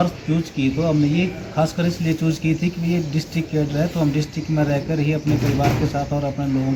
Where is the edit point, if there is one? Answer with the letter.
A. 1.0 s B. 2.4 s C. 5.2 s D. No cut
D